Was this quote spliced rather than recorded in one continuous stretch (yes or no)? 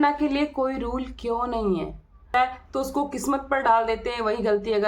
yes